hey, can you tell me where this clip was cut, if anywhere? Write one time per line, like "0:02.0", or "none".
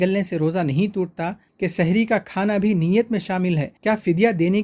0:01.4
0:03.7